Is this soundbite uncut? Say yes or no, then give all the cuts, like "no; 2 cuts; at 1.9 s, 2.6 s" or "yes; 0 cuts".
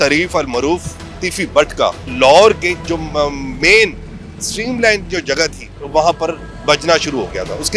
no; 1 cut; at 2.1 s